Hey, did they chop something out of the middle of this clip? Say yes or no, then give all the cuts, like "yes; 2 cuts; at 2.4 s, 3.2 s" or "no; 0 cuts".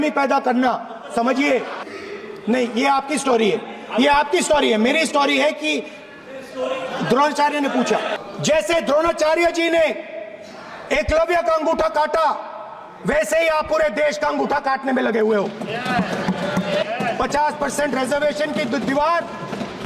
yes; 3 cuts; at 1.8 s, 8.2 s, 16.8 s